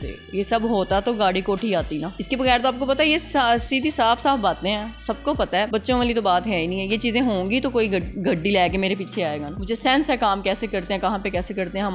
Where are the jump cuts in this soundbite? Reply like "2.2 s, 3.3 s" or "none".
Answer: 2.1 s, 5.7 s, 9.5 s

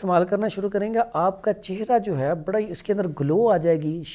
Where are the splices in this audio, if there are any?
none

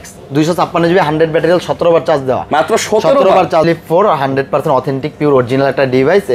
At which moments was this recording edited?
3.6 s

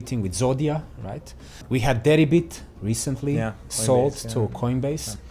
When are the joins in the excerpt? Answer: 1.6 s

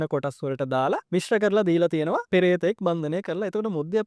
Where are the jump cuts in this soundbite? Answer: 1.0 s, 2.2 s

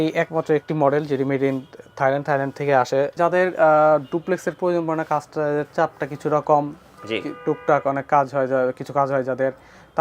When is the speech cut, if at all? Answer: 3.1 s

